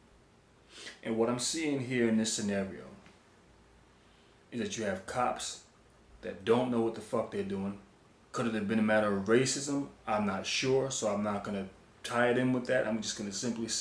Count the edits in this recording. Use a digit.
1